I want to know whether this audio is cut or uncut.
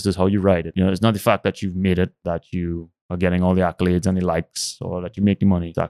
uncut